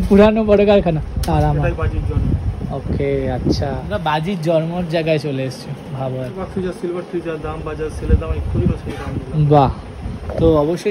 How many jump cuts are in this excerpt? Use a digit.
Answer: 3